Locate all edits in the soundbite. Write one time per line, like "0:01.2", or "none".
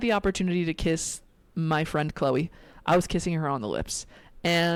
none